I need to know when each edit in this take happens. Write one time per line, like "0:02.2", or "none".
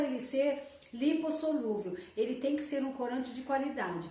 none